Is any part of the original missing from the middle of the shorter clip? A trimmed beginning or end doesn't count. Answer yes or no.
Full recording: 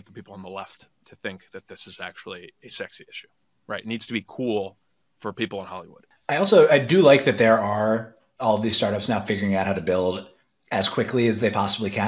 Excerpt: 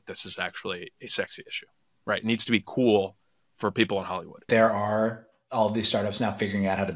yes